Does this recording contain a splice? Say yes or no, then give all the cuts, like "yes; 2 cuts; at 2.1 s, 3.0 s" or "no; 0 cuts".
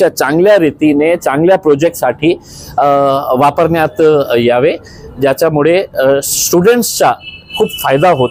no; 0 cuts